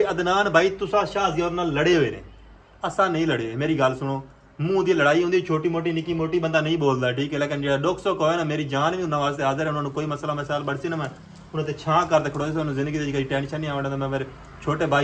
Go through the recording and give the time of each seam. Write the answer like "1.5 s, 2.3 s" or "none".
none